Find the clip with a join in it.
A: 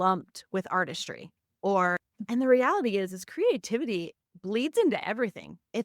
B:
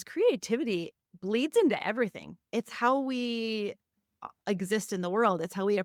A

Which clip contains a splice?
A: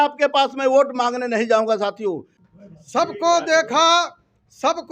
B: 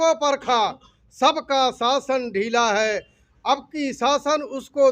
A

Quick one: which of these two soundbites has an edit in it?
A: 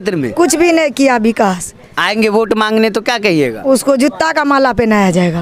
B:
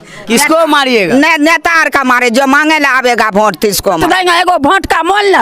B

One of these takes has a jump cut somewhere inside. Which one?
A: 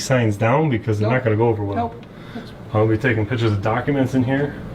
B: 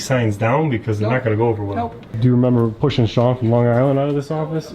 B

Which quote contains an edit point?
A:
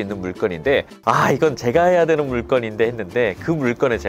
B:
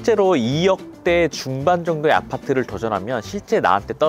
A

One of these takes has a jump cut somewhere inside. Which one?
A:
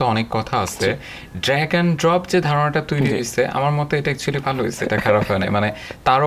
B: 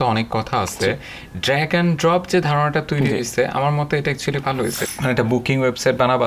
B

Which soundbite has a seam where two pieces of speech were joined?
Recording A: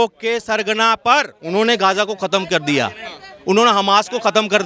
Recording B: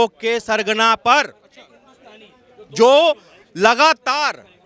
A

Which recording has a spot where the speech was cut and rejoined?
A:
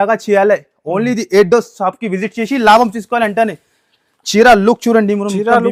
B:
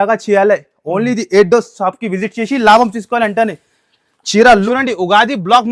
B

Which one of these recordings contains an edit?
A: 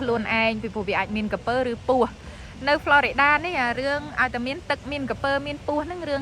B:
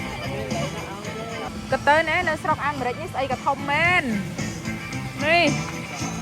B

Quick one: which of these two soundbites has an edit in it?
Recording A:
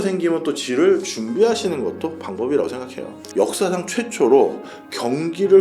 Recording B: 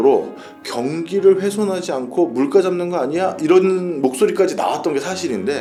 A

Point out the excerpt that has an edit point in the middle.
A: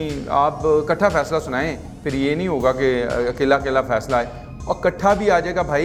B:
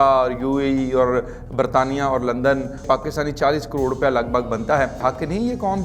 B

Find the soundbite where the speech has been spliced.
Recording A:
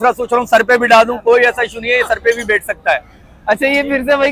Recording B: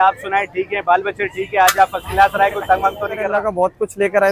B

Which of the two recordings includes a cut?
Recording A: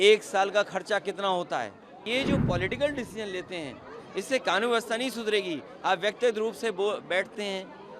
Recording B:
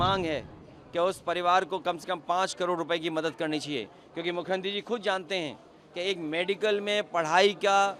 A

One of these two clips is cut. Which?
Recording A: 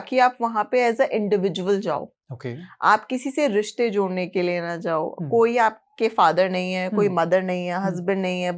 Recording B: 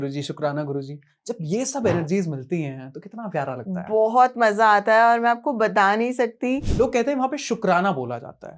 B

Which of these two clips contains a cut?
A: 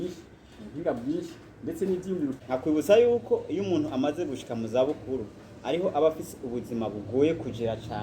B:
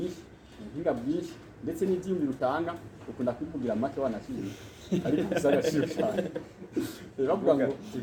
A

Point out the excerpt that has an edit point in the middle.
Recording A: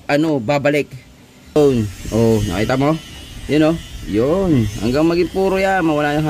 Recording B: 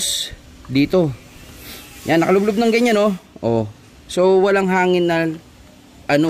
A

